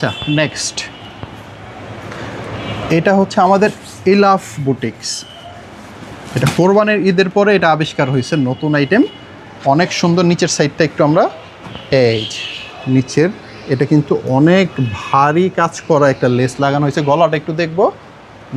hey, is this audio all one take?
yes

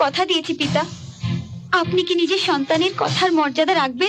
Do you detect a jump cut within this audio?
no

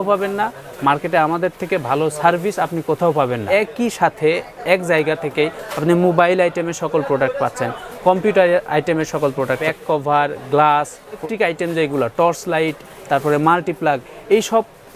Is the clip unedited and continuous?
no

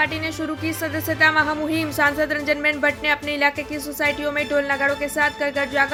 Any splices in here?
no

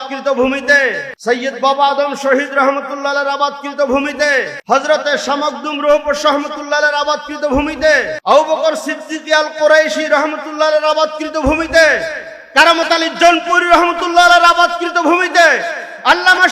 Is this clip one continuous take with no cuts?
no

